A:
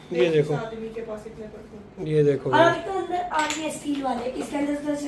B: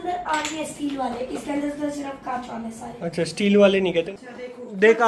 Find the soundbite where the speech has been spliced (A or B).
B